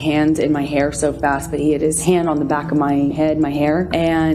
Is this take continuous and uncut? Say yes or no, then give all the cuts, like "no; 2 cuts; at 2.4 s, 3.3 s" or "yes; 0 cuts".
no; 2 cuts; at 2.0 s, 3.3 s